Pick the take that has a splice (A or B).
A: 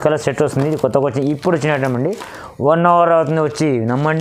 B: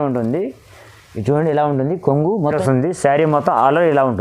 B